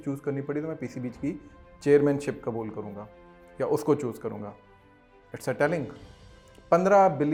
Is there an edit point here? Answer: no; 0 cuts

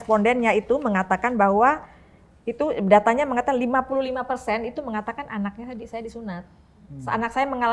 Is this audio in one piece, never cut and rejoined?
yes; 0 cuts

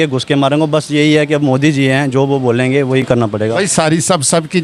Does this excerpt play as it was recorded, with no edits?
yes; 0 cuts

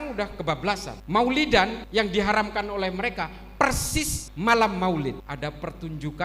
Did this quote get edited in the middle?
yes; 4 cuts; at 0.9 s, 1.8 s, 4.2 s, 5.2 s

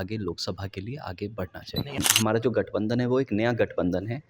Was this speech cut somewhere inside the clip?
yes; 1 cut; at 1.9 s

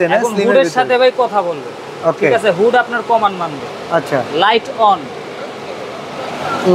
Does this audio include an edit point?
no; 0 cuts

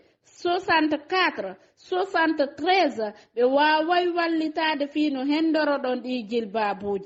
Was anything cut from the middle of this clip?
no; 0 cuts

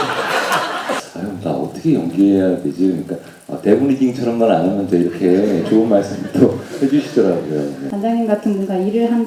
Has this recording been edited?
yes; 2 cuts; at 0.9 s, 7.8 s

